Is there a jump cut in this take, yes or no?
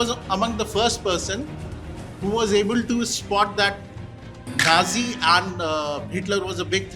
no